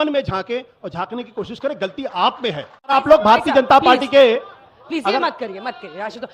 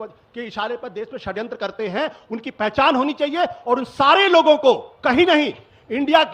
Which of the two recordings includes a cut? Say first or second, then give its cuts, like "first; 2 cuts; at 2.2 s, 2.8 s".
first; 1 cut; at 2.9 s